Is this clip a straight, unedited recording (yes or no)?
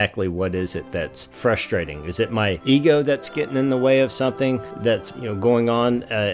no